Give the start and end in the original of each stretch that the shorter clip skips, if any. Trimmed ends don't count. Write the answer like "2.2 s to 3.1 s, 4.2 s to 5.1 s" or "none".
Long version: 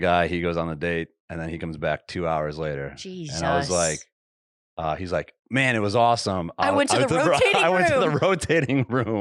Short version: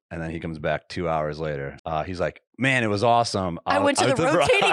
2.9 s to 4.7 s